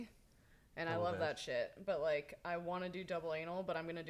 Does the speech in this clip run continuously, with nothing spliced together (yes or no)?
yes